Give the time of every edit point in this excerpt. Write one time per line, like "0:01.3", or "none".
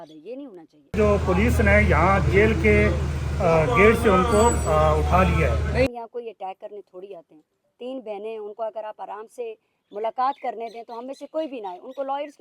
0:00.9
0:05.9